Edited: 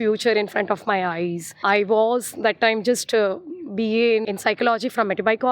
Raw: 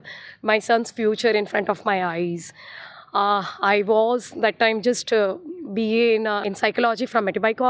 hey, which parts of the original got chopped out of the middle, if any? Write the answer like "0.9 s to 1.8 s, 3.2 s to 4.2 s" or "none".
2.5 s to 3.5 s, 6.2 s to 6.4 s